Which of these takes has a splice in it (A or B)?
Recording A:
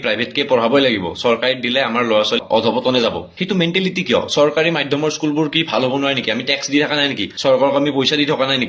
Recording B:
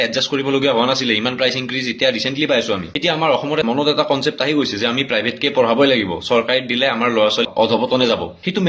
B